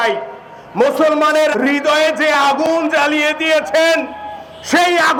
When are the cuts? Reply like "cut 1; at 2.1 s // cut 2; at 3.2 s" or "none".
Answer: none